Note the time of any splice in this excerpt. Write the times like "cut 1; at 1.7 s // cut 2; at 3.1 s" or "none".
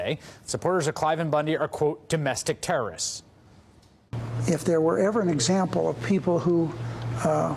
none